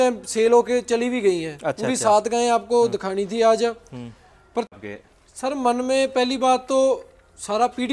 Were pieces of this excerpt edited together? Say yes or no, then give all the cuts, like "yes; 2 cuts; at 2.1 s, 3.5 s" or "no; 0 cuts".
yes; 1 cut; at 4.7 s